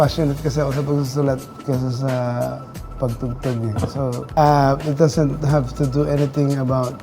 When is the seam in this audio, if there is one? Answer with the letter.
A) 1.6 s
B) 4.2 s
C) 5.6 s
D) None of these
B